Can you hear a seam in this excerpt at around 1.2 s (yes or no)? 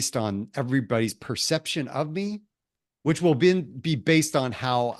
no